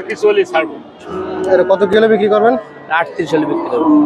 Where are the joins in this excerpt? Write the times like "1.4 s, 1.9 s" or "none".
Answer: 1.2 s